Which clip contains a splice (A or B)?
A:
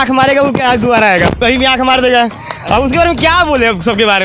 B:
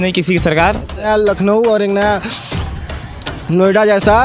B